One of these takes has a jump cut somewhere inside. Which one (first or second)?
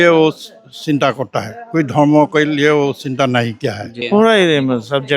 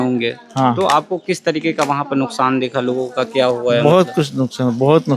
first